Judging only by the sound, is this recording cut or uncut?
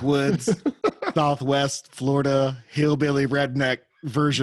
uncut